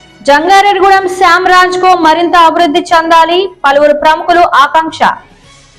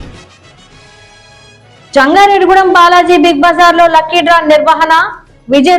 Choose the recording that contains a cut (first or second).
second